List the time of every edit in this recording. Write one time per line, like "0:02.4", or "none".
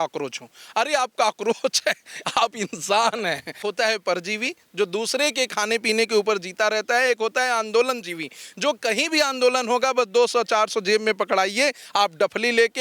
0:03.6